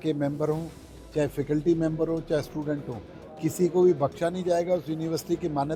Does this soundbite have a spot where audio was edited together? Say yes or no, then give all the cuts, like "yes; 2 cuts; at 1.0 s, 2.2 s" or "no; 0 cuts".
no; 0 cuts